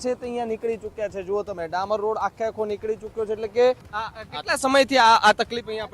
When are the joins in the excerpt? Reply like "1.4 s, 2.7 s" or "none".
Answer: 3.9 s